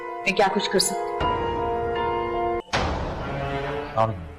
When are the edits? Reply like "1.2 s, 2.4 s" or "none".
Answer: 2.6 s